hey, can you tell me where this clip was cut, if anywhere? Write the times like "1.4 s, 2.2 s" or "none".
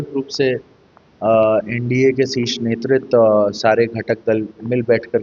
none